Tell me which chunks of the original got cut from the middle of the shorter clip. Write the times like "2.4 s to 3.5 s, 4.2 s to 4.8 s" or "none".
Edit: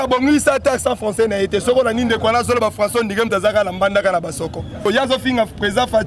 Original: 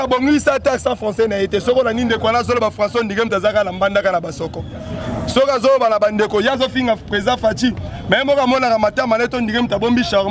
4.8 s to 6.3 s